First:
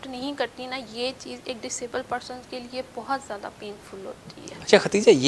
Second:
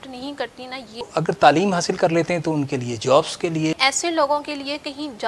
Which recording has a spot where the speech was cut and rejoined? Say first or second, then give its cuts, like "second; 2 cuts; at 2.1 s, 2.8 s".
second; 2 cuts; at 1.0 s, 3.7 s